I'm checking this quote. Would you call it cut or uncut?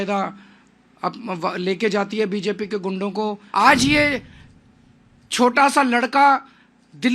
cut